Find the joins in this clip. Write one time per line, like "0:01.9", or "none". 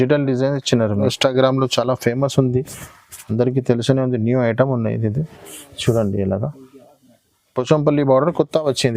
0:01.1